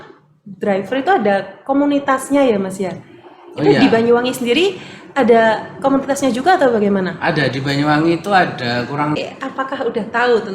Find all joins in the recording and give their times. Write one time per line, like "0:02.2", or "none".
0:09.2